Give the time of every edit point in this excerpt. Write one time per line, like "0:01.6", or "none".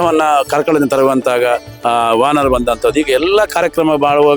0:01.7